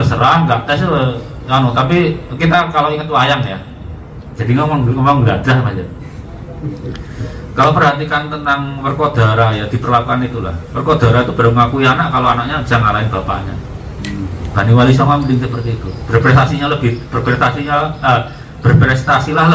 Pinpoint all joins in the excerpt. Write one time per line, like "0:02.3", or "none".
none